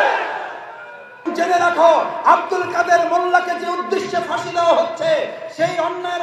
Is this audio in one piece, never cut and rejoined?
no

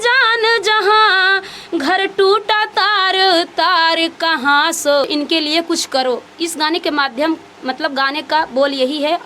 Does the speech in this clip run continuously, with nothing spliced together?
no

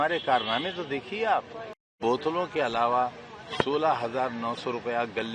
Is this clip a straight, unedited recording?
no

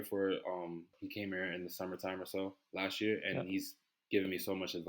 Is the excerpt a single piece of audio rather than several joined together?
no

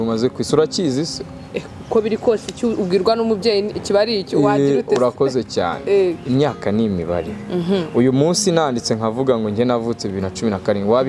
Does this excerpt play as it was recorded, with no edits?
yes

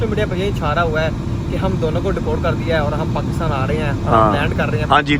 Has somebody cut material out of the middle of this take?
no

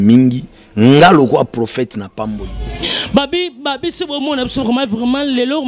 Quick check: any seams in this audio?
yes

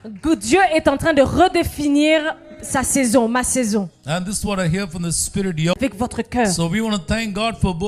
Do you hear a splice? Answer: yes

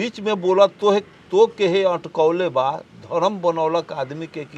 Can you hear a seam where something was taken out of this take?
no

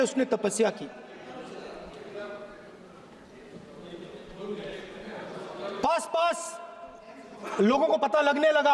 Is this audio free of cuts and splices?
yes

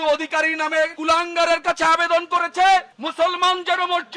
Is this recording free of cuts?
no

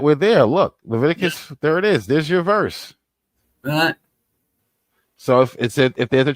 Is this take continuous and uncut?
no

